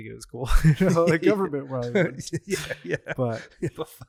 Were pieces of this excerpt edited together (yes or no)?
no